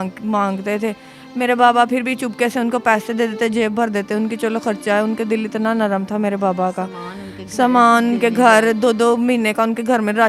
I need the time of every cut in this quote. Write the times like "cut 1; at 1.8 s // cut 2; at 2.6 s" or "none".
none

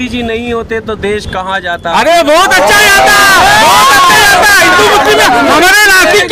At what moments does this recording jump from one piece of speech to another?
none

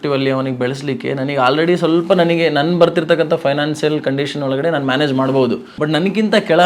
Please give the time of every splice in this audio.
cut 1; at 5.7 s

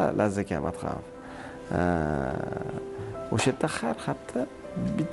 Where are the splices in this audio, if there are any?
none

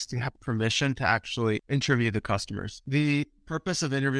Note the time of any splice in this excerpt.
cut 1; at 1.6 s // cut 2; at 2.8 s

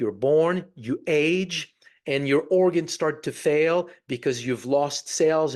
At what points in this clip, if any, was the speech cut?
none

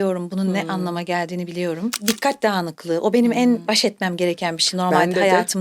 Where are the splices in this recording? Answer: cut 1; at 2.0 s // cut 2; at 3.6 s

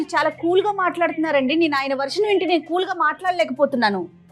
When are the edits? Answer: none

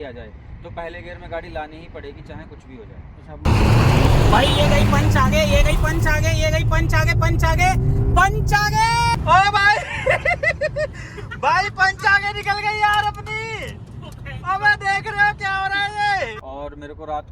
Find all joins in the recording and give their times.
cut 1; at 3.4 s // cut 2; at 9.2 s // cut 3; at 16.2 s

